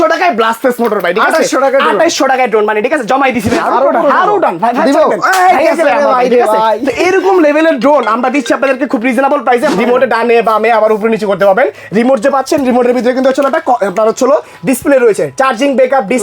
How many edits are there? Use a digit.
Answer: 2